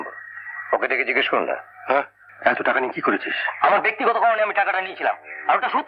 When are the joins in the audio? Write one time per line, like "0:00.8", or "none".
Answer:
0:02.2